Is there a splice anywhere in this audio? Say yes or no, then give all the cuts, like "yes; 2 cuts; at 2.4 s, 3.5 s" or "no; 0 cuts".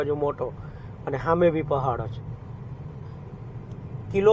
yes; 1 cut; at 3.2 s